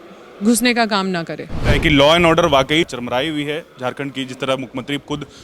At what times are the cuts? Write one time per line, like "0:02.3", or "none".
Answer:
0:01.8
0:02.9